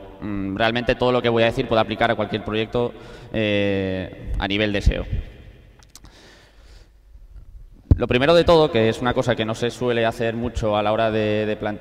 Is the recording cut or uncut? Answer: cut